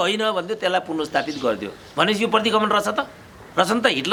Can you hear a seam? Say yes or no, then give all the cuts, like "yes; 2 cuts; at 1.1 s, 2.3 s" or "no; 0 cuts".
no; 0 cuts